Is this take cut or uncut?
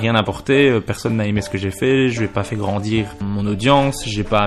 cut